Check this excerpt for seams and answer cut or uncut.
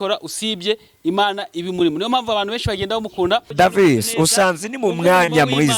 cut